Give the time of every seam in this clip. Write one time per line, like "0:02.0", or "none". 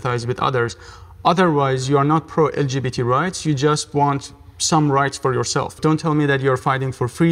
0:05.8